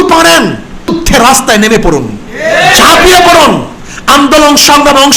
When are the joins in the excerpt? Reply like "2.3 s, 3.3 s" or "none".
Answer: 0.9 s